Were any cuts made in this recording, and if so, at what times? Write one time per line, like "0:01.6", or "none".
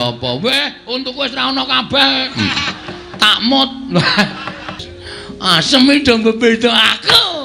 0:04.9